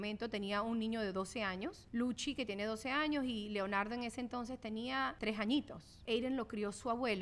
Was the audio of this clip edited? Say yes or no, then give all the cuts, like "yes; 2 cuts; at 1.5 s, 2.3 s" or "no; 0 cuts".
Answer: yes; 3 cuts; at 1.8 s, 5.2 s, 6.0 s